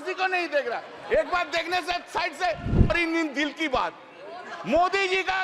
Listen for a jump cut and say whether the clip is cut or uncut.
cut